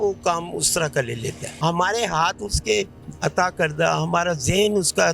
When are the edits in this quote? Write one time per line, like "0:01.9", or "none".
0:01.5